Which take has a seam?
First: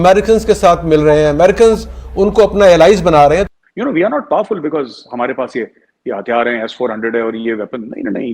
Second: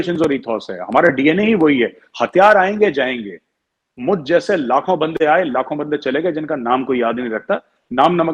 first; 1 cut; at 3.5 s

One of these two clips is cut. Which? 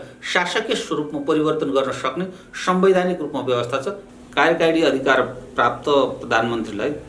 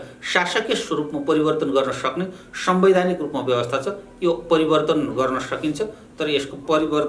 first; 1 cut; at 4.0 s

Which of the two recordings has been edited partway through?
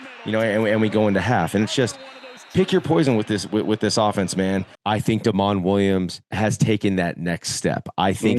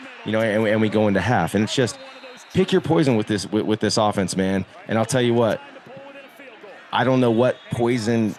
first; 1 cut; at 4.7 s

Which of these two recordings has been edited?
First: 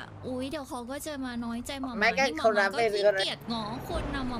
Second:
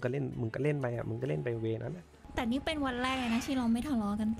second; 1 cut; at 2.1 s

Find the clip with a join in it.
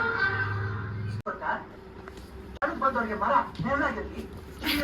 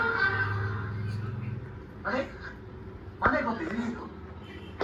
first; 1 cut; at 1.2 s

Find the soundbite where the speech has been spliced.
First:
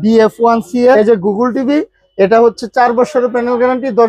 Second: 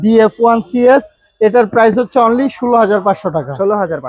first; 1 cut; at 1.0 s

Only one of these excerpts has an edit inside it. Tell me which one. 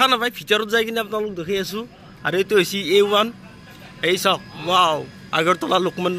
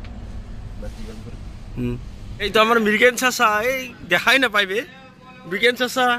second; 1 cut; at 2.5 s

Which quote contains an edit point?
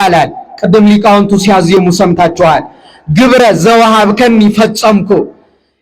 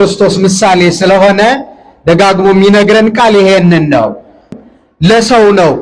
second; 1 cut; at 4.5 s

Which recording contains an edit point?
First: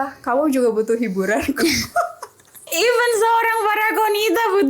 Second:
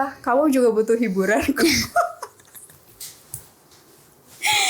first; 1 cut; at 2.7 s

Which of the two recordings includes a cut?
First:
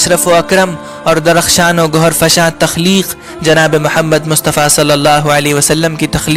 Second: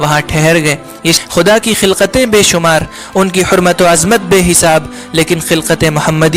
second; 1 cut; at 1.2 s

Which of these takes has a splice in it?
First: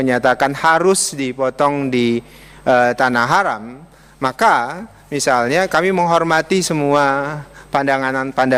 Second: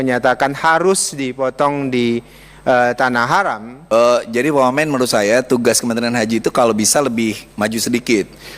second; 1 cut; at 3.9 s

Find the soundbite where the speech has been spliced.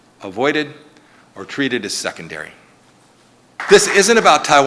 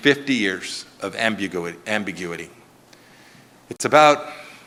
first; 1 cut; at 3.5 s

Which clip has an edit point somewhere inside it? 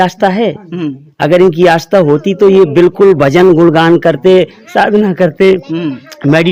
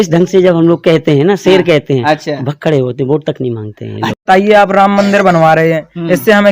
second; 1 cut; at 4.2 s

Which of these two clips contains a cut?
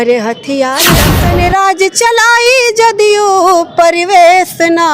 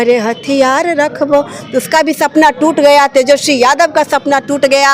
first; 1 cut; at 1.1 s

